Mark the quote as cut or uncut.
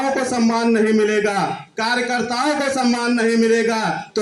uncut